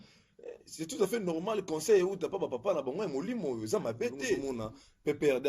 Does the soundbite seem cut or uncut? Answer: cut